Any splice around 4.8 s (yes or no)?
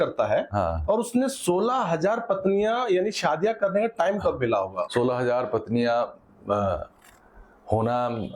no